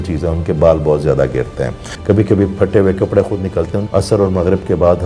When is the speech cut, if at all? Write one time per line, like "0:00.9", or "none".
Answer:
0:01.9
0:03.8